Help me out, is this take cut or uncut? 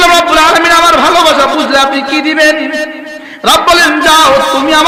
uncut